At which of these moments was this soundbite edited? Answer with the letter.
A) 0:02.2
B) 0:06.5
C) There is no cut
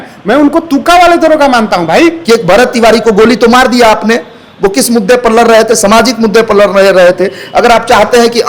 A